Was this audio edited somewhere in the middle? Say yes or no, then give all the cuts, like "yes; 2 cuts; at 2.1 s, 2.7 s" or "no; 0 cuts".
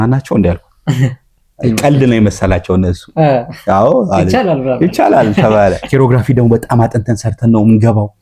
yes; 1 cut; at 5.8 s